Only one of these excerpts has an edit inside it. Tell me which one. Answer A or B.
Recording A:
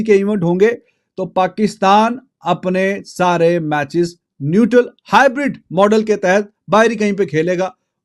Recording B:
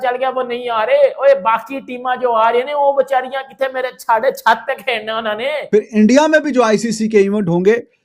B